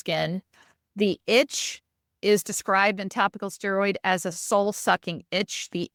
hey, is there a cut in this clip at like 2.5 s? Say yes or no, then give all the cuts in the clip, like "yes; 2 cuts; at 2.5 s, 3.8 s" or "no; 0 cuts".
no; 0 cuts